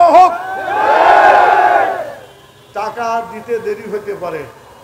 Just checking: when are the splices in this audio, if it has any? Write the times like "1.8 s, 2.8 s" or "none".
none